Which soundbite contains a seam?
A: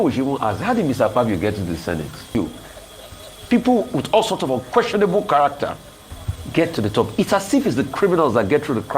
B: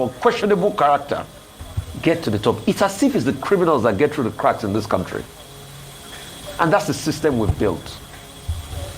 A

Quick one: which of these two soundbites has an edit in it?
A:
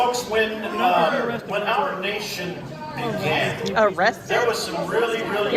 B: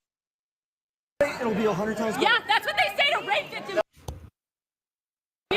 A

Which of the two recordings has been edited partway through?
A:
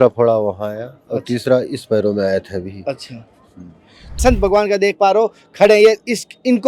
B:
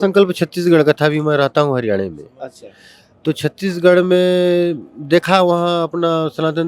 A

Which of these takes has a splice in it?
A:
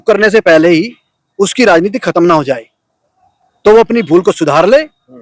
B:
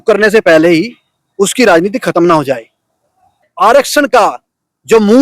B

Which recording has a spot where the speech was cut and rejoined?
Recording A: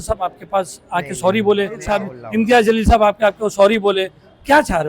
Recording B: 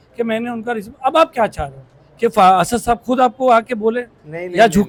A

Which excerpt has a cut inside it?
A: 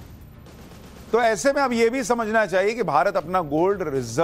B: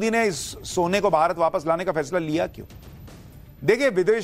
B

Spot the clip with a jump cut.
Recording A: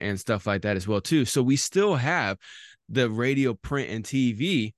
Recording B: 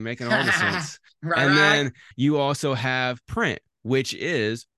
B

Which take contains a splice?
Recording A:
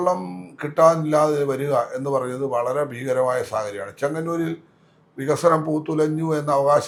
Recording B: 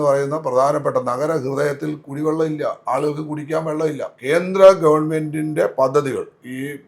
B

